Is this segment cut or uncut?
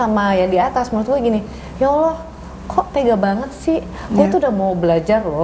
uncut